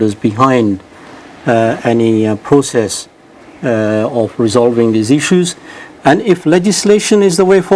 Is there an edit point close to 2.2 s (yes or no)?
yes